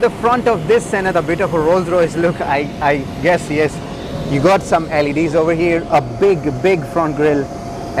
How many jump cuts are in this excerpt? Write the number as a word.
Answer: zero